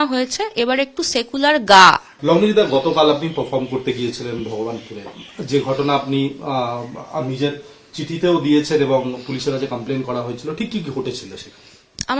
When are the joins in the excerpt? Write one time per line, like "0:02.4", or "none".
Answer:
0:02.0